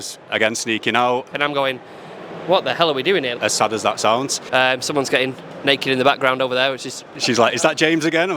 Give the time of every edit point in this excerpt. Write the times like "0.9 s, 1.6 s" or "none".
1.3 s, 3.3 s, 4.4 s, 7.0 s